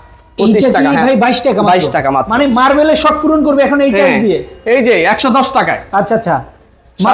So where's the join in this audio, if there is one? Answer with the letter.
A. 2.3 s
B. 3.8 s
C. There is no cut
A